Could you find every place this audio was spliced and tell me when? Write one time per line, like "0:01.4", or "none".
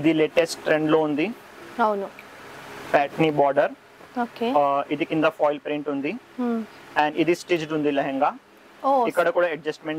none